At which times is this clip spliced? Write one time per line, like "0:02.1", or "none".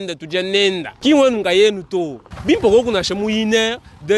0:00.9
0:02.2

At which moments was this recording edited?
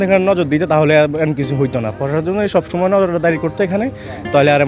none

